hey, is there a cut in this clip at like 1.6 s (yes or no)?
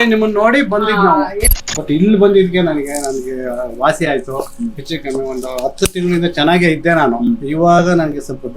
yes